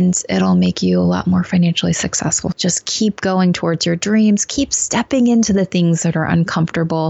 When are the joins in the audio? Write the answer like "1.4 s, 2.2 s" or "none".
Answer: 2.5 s